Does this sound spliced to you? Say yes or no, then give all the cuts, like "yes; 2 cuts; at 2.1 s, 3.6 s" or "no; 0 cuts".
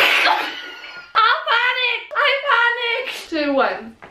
no; 0 cuts